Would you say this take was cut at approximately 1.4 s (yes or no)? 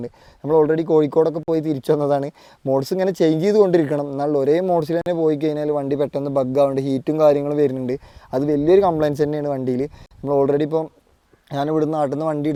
no